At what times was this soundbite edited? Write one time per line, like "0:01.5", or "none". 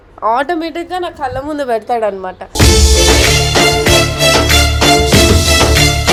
none